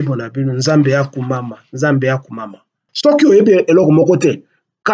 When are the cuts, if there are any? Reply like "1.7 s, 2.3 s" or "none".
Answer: 2.9 s